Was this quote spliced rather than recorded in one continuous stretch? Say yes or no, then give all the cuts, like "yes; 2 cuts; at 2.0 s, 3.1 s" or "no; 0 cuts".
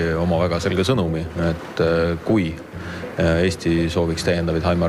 no; 0 cuts